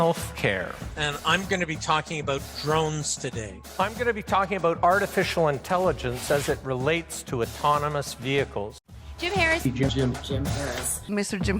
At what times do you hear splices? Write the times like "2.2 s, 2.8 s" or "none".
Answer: 9.1 s